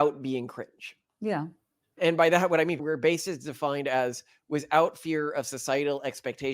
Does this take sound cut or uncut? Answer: cut